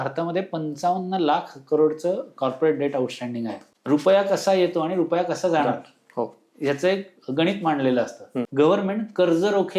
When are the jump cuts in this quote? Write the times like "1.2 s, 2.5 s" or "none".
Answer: 3.6 s, 8.4 s